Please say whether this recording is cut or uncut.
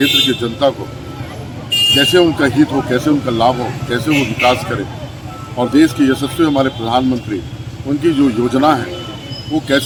uncut